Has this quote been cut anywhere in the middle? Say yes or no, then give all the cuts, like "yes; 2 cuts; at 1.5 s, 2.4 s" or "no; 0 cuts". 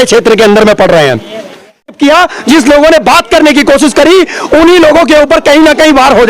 yes; 1 cut; at 1.9 s